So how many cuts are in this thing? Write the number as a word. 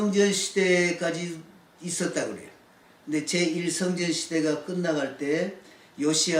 zero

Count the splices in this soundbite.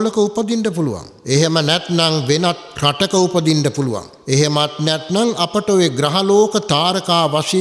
three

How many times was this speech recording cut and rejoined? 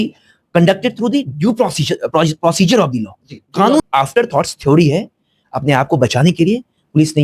one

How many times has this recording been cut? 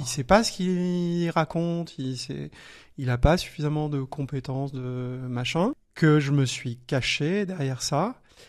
one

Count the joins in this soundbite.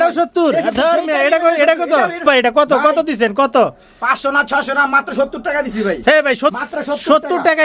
two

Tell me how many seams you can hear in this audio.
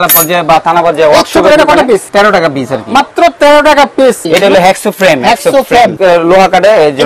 three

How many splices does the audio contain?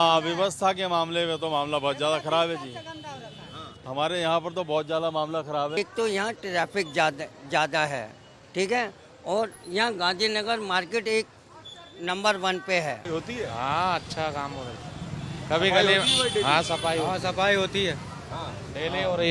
two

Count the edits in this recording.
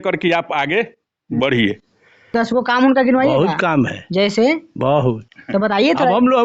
one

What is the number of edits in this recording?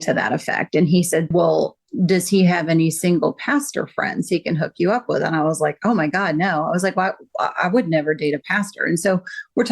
one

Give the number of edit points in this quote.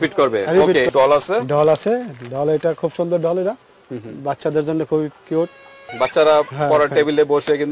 two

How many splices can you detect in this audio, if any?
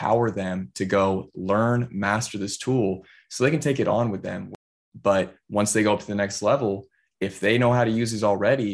one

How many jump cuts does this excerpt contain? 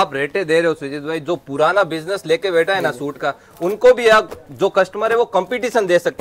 zero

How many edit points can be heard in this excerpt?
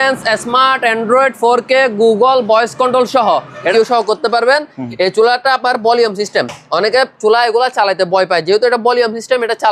one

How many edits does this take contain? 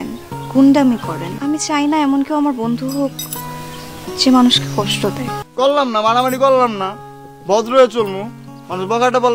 two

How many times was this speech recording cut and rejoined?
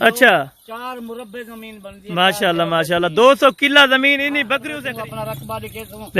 one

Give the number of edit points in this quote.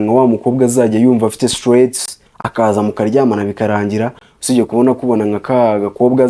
zero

